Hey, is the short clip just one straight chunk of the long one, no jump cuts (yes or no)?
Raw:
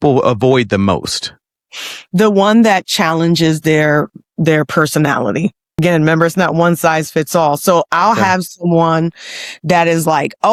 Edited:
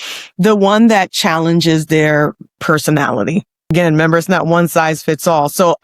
no